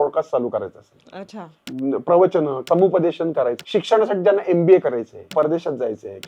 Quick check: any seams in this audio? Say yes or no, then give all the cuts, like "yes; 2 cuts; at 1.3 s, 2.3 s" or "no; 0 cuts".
yes; 4 cuts; at 1.6 s, 2.6 s, 3.6 s, 5.3 s